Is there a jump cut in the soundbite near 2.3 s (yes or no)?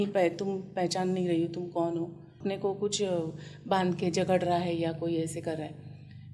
yes